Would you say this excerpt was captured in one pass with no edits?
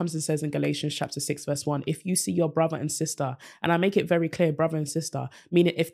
yes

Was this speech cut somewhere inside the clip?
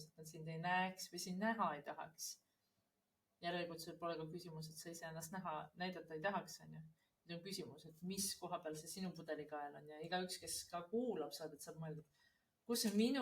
no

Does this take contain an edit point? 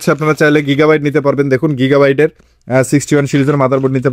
no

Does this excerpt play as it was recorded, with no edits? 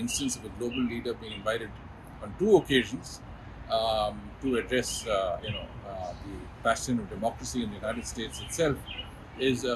yes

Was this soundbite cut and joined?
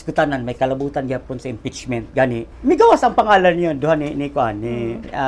yes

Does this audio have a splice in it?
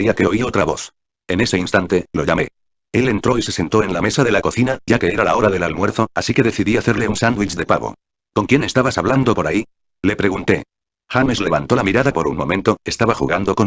yes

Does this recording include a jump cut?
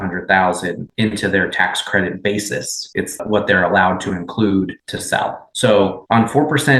yes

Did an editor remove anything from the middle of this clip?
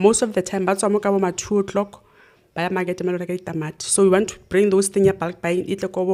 no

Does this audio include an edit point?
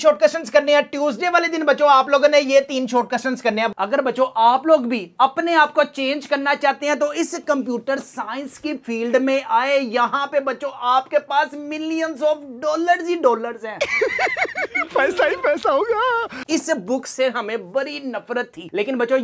yes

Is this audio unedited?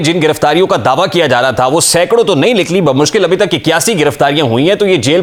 yes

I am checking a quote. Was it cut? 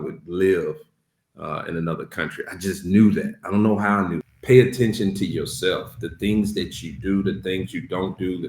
yes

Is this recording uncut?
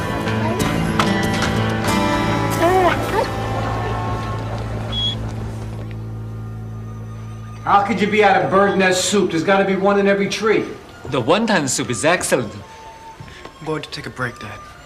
no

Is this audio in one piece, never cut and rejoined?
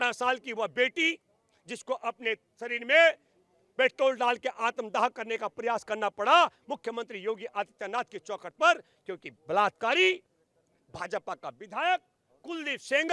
yes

